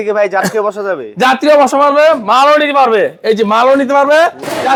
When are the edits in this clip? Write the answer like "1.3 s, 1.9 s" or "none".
none